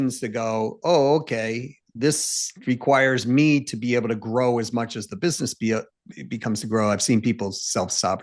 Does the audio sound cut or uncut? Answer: uncut